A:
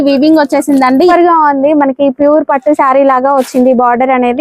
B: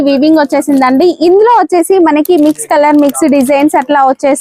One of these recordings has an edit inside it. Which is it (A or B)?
A